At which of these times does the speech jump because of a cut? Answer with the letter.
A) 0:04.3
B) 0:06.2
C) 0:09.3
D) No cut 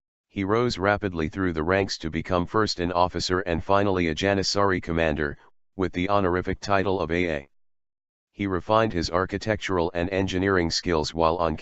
D